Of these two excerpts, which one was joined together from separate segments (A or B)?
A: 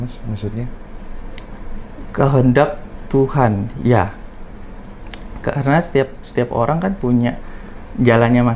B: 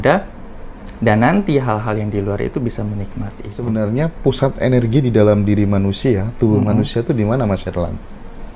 B